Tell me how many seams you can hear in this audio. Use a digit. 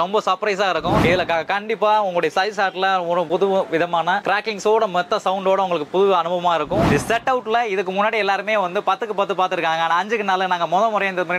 3